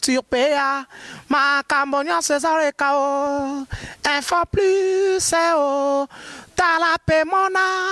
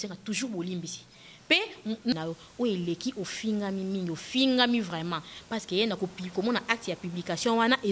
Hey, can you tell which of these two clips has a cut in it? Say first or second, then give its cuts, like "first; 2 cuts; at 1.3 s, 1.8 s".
second; 1 cut; at 2.1 s